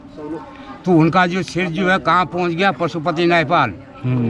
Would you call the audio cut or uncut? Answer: uncut